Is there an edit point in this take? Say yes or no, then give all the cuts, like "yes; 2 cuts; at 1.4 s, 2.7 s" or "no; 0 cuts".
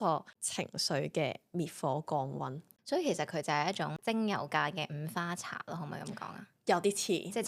yes; 2 cuts; at 2.6 s, 4.0 s